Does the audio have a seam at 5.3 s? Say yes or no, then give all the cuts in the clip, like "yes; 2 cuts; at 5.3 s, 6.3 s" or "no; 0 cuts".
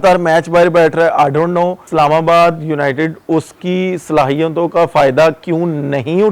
no; 1 cut; at 1.9 s